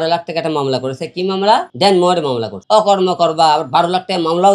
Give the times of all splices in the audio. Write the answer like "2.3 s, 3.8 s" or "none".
1.7 s, 2.5 s